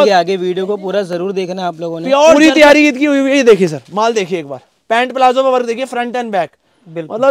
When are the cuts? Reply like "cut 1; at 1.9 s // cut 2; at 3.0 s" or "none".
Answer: cut 1; at 2.3 s